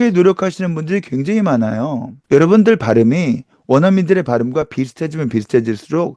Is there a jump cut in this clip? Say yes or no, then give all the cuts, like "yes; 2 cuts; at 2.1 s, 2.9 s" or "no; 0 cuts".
no; 0 cuts